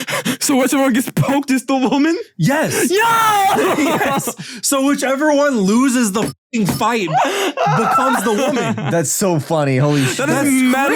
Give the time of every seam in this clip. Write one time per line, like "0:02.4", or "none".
none